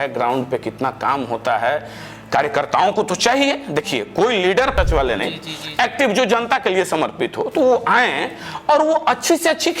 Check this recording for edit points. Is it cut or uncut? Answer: cut